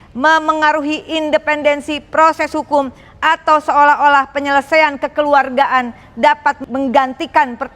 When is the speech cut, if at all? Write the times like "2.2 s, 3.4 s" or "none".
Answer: 6.6 s